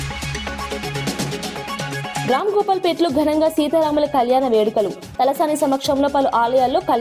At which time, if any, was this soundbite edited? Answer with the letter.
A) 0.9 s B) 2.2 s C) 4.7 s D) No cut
B